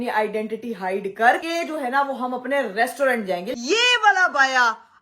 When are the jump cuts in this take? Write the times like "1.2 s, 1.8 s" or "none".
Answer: 1.4 s, 3.5 s